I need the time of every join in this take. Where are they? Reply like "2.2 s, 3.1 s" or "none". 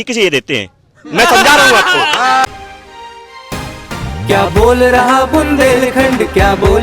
2.5 s